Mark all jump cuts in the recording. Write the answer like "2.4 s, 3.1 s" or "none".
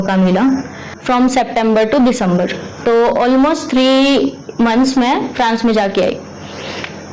0.9 s